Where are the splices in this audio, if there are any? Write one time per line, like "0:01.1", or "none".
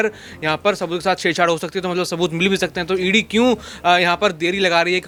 none